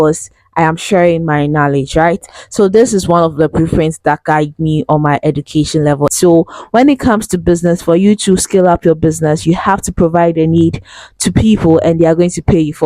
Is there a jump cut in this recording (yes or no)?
yes